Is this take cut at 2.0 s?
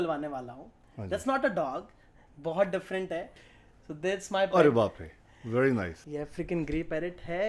no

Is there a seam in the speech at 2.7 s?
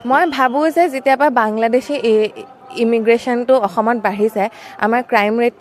no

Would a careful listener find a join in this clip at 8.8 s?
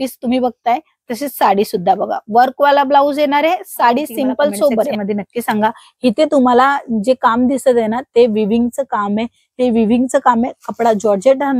no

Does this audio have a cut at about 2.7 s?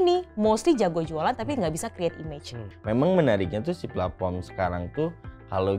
yes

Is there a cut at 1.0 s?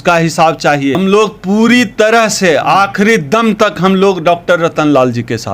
yes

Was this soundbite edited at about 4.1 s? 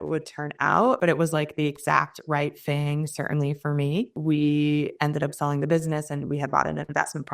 yes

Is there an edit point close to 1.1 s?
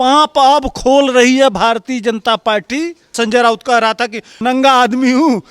no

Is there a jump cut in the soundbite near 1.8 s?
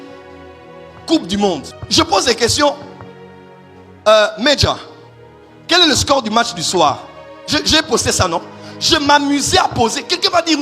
yes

